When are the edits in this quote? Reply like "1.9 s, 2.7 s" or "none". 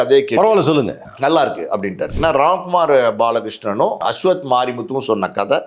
1.0 s, 2.1 s, 4.0 s